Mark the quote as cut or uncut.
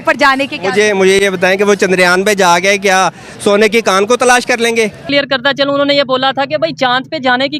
cut